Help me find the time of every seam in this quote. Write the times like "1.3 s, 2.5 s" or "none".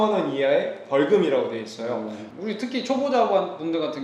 2.2 s

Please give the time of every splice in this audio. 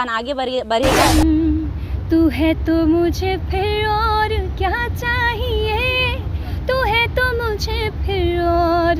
1.1 s

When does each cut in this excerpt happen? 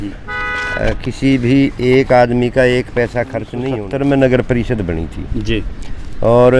3.6 s

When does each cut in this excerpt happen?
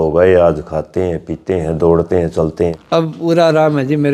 2.8 s

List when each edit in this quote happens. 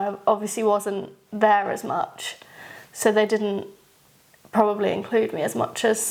none

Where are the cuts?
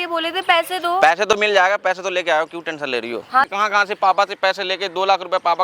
3.5 s

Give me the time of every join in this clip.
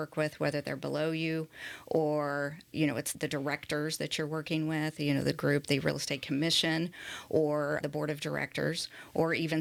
none

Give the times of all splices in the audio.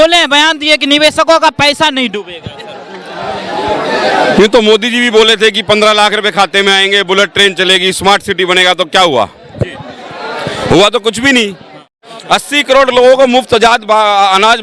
12.1 s

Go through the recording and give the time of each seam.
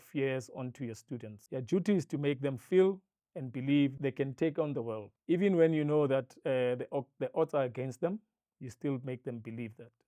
1.4 s, 4.0 s, 5.1 s

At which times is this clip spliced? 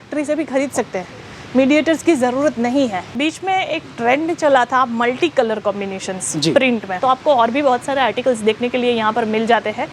3.2 s, 6.9 s

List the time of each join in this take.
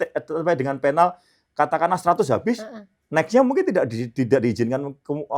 none

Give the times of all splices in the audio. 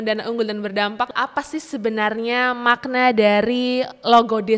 1.1 s

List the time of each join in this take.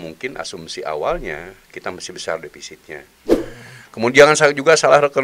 3.1 s

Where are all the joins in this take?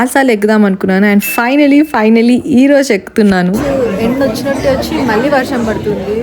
3.6 s

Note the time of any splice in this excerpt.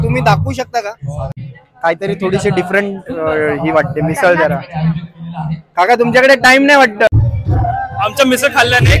1.2 s, 7.1 s

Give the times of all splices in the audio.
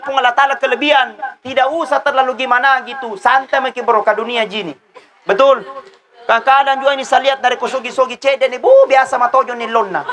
none

